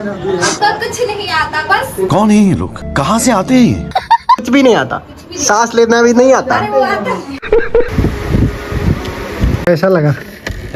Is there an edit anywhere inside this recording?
yes; 2 cuts; at 4.4 s, 7.9 s

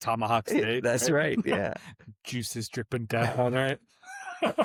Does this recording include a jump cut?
no; 0 cuts

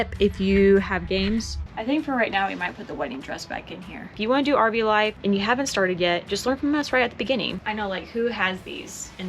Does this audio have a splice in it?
yes; 3 cuts; at 1.6 s, 4.1 s, 7.6 s

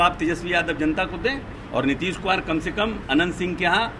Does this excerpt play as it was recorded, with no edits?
no; 1 cut; at 1.5 s

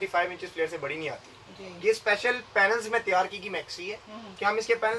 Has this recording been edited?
no; 0 cuts

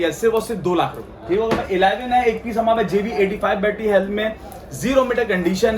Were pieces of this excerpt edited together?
yes; 1 cut; at 1.1 s

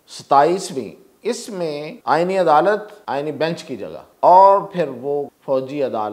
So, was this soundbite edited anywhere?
yes; 4 cuts; at 1.9 s, 2.9 s, 4.0 s, 5.3 s

